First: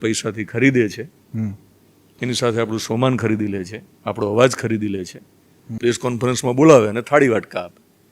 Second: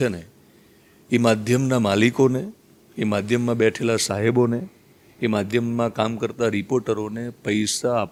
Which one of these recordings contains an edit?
first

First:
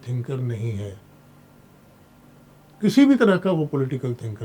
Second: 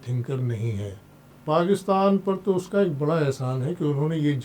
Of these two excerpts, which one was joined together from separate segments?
second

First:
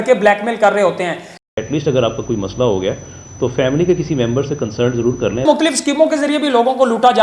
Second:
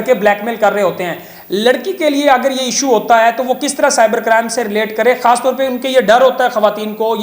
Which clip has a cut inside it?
first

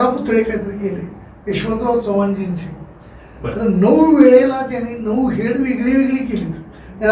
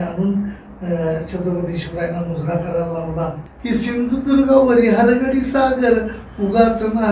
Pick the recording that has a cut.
second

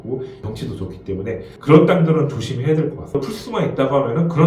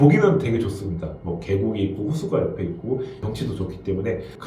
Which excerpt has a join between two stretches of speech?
first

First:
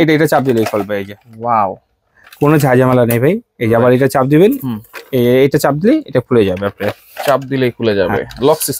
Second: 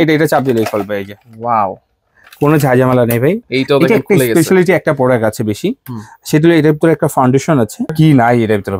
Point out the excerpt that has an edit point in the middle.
second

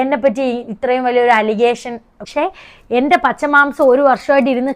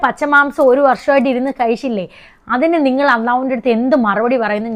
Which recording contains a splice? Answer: first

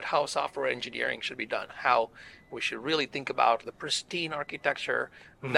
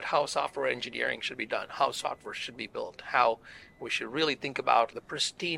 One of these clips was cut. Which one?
first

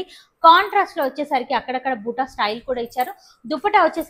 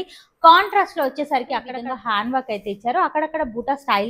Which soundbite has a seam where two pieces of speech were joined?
second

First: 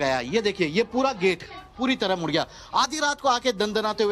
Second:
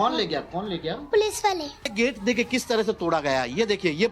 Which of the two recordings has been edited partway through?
second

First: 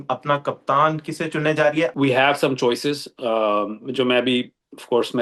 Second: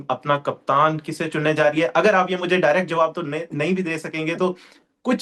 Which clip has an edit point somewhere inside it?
first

